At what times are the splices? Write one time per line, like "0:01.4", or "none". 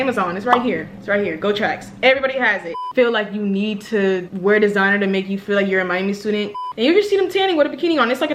0:02.8
0:06.7